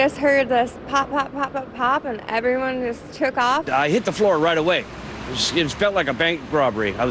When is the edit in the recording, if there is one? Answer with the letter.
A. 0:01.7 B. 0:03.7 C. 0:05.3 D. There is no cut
B